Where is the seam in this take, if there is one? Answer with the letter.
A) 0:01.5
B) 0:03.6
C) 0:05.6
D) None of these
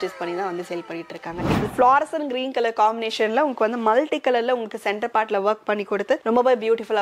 A